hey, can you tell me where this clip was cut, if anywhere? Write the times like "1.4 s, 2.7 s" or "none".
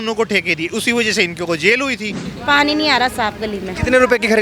2.2 s